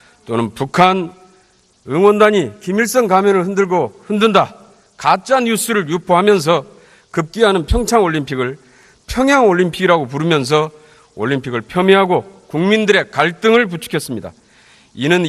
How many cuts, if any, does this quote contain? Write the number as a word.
one